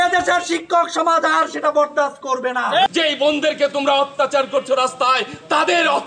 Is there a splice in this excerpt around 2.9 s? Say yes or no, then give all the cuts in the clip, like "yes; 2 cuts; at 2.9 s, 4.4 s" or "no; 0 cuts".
yes; 1 cut; at 2.9 s